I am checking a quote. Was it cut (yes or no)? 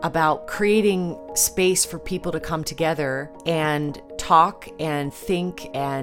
yes